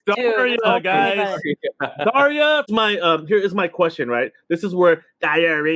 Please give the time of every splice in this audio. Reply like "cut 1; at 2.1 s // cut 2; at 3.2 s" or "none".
cut 1; at 2.7 s

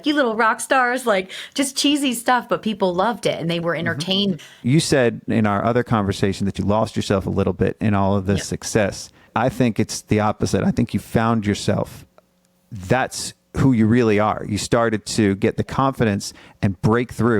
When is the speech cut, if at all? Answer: cut 1; at 4.6 s // cut 2; at 9.3 s // cut 3; at 12.2 s

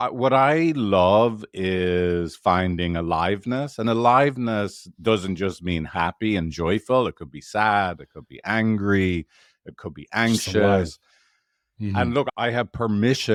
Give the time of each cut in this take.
none

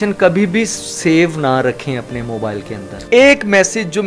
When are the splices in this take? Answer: cut 1; at 3.1 s

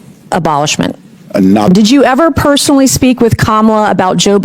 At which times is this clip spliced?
cut 1; at 1.7 s

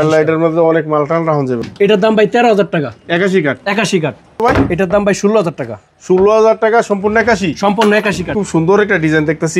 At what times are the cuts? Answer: cut 1; at 1.7 s // cut 2; at 4.4 s // cut 3; at 8.3 s

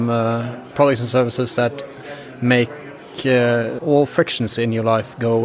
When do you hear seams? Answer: cut 1; at 3.8 s

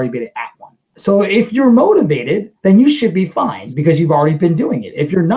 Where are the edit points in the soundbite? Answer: cut 1; at 0.9 s // cut 2; at 2.5 s

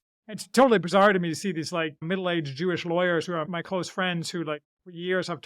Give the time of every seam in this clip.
cut 1; at 2.0 s // cut 2; at 3.5 s

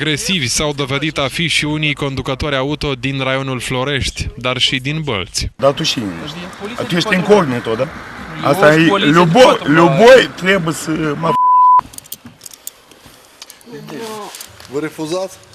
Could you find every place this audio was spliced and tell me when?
cut 1; at 10.8 s

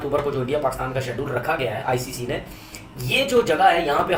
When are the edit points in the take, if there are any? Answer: none

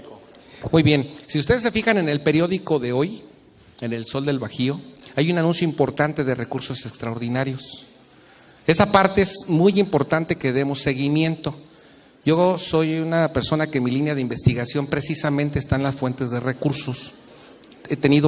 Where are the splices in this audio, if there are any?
none

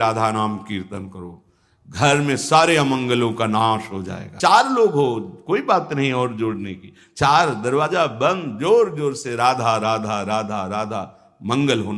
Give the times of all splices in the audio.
cut 1; at 4.3 s

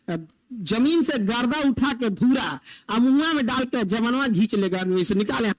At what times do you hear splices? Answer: none

